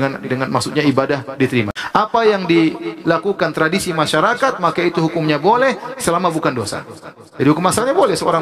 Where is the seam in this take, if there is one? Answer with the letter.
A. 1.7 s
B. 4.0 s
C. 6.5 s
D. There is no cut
A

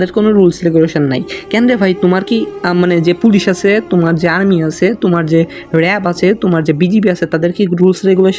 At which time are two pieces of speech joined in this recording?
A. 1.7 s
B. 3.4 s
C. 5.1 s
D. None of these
D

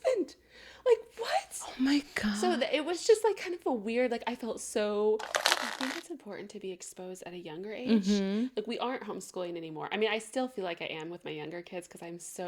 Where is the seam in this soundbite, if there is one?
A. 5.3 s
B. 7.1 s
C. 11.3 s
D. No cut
A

